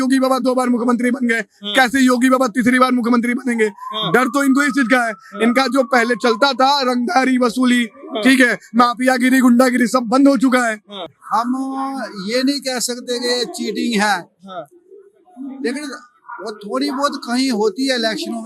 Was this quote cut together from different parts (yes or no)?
yes